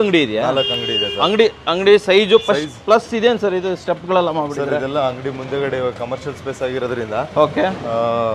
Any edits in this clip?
no; 0 cuts

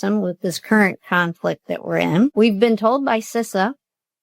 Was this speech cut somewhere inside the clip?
yes; 1 cut; at 2.3 s

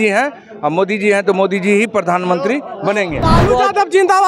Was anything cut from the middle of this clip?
yes; 1 cut; at 3.2 s

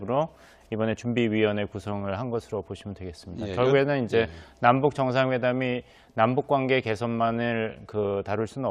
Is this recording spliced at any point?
no; 0 cuts

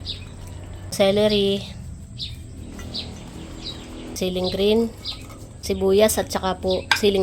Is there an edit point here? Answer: yes; 3 cuts; at 0.9 s, 4.2 s, 5.6 s

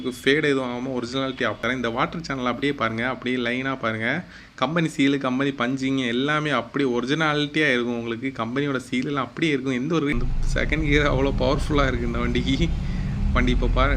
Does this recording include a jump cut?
yes; 2 cuts; at 1.6 s, 10.1 s

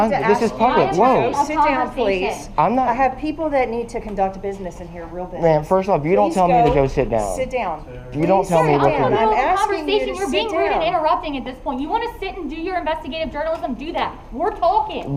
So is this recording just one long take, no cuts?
yes; 0 cuts

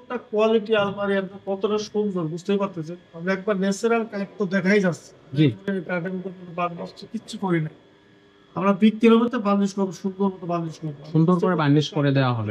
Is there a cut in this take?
no; 0 cuts

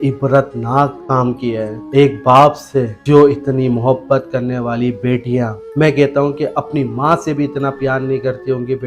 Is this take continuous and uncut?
no; 1 cut; at 1.8 s

